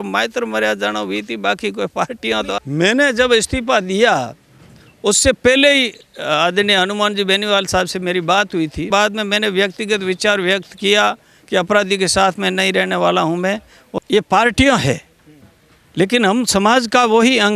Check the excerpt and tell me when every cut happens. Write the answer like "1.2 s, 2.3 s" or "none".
2.5 s, 8.9 s, 13.8 s